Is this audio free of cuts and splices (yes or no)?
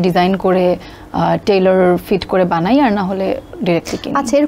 yes